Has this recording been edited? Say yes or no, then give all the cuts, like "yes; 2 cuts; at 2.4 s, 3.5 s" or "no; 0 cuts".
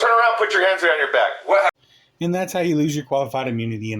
no; 0 cuts